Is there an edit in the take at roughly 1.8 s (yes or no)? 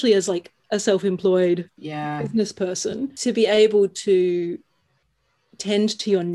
no